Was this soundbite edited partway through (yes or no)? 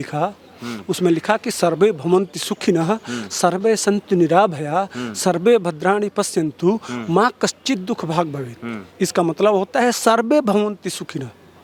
no